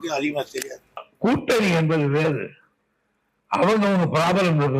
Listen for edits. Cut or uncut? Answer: cut